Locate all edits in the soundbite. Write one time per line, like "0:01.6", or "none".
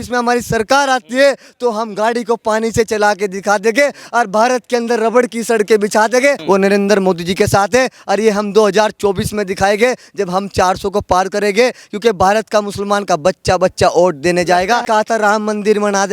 0:06.4
0:14.8